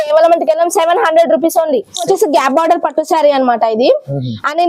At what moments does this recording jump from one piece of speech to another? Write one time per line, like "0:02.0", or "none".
0:02.1